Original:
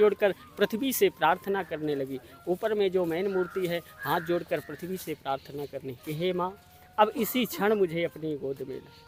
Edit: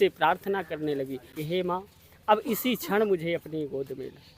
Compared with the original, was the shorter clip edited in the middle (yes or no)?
yes